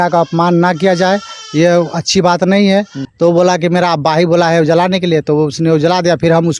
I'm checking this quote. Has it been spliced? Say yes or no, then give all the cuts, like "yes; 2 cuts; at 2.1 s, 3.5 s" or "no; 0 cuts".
yes; 1 cut; at 3.0 s